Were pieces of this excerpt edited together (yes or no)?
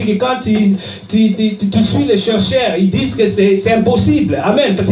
no